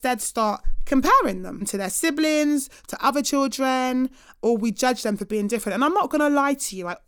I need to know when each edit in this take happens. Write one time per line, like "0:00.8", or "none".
0:01.6